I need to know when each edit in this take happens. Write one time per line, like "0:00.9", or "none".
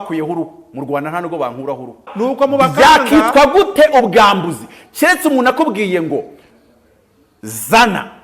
0:02.1